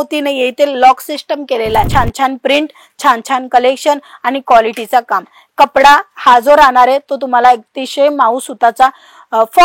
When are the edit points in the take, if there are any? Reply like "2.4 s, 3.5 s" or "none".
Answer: 1.9 s